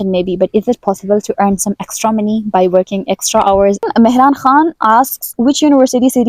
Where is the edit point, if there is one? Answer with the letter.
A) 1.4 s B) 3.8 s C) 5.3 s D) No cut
B